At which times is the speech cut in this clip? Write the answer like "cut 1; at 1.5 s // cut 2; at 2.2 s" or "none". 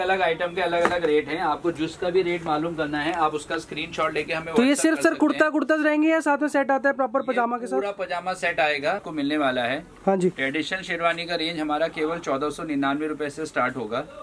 cut 1; at 9.0 s

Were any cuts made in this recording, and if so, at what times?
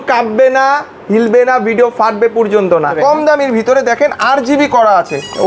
cut 1; at 3.0 s

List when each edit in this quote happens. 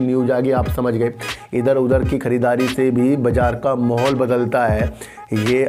none

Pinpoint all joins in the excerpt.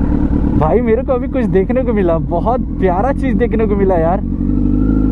none

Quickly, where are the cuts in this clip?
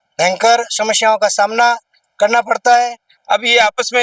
cut 1; at 3.1 s

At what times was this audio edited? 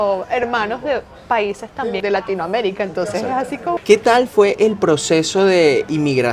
cut 1; at 2.0 s // cut 2; at 3.8 s

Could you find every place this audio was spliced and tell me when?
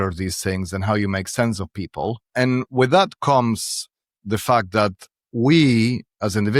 cut 1; at 2.3 s

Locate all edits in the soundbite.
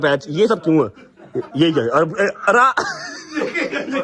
cut 1; at 2.2 s

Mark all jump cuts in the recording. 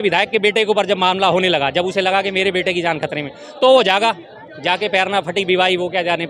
none

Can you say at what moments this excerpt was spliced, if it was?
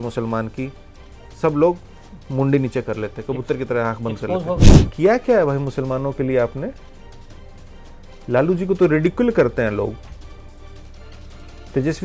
cut 1; at 4.7 s

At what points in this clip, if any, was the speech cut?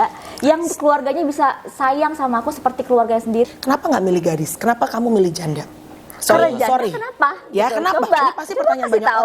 cut 1; at 3.5 s

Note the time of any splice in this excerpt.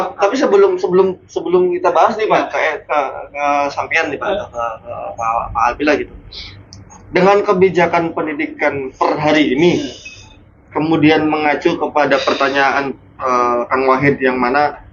none

